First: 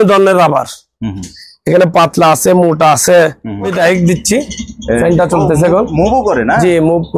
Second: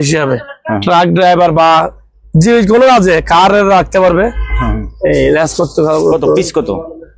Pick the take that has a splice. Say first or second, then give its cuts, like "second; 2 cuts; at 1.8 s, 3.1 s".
first; 1 cut; at 3.7 s